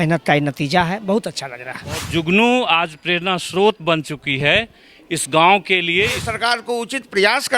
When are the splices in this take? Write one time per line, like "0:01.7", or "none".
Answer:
0:02.1
0:06.2